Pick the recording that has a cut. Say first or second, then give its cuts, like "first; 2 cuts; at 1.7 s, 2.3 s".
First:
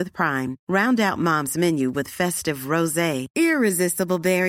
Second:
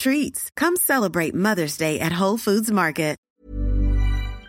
second; 1 cut; at 3.3 s